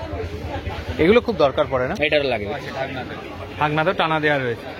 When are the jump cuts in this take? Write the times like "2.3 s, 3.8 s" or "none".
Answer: 2.5 s